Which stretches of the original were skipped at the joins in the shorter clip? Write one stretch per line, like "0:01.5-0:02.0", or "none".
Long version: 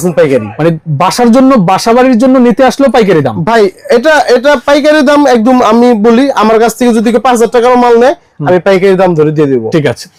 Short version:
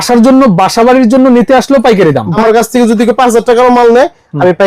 0:03.5-0:06.4